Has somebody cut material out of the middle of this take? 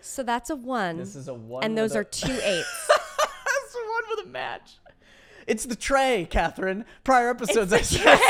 no; 0 cuts

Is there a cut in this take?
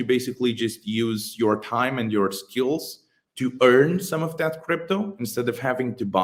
no; 0 cuts

